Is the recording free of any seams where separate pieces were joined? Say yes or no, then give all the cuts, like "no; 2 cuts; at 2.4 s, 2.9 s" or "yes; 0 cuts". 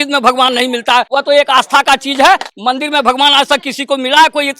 no; 2 cuts; at 1.1 s, 2.5 s